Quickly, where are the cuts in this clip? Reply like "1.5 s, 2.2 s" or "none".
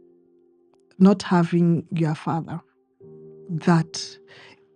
none